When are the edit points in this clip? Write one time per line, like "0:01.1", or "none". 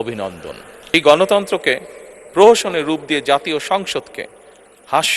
0:00.9